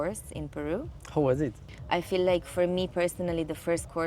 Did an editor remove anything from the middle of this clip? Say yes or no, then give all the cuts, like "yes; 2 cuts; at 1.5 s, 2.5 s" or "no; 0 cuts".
yes; 1 cut; at 1.7 s